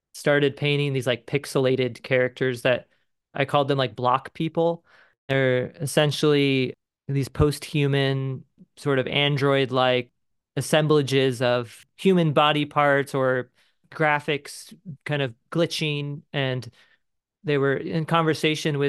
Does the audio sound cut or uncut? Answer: cut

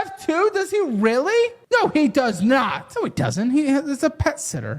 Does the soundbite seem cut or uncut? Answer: cut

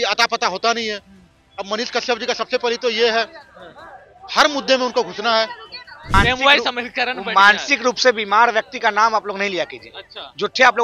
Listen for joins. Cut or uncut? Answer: cut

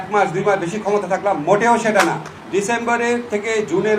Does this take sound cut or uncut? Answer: cut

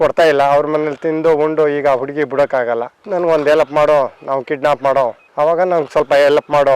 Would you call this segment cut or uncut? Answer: uncut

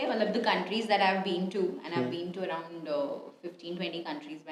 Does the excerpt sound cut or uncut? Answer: uncut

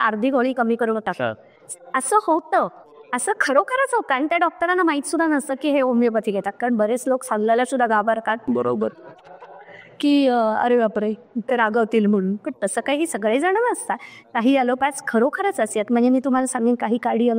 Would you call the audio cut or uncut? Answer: uncut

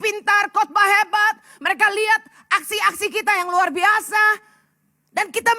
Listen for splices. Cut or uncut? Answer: uncut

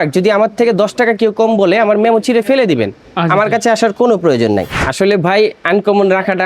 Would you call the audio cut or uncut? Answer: cut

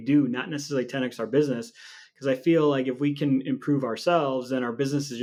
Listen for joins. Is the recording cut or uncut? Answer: uncut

